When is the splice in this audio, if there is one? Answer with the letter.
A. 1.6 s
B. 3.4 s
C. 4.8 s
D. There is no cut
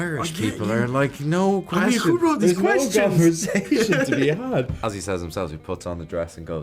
C